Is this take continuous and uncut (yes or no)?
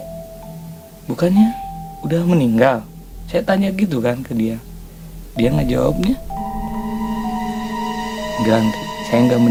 yes